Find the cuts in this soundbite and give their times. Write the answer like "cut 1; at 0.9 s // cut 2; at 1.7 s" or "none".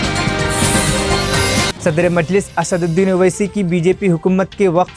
cut 1; at 1.7 s